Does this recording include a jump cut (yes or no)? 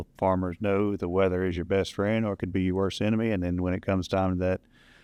no